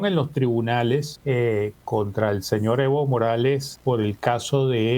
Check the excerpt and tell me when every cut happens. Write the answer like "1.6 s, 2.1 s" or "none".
1.1 s, 3.7 s